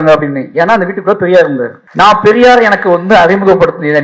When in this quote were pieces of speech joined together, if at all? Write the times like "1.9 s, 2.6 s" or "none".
1.8 s